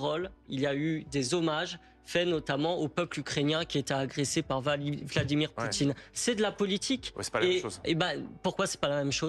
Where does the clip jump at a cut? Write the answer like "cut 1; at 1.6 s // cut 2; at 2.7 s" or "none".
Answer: none